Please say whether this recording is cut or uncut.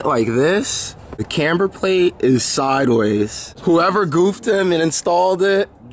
cut